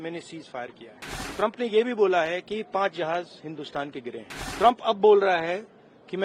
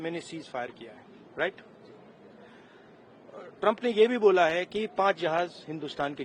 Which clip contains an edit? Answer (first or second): first